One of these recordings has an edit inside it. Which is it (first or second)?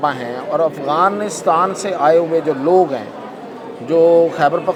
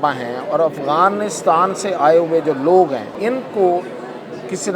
second